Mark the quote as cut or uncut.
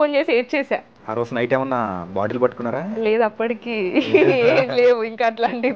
uncut